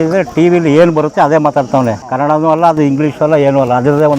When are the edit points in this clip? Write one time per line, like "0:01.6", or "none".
0:02.0